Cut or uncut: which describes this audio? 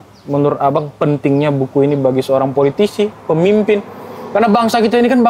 uncut